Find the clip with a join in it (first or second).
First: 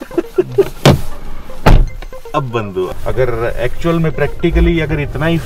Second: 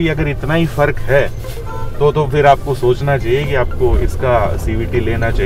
first